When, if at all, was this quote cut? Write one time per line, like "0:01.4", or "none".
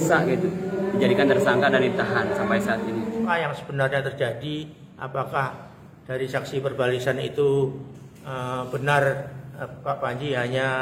0:03.3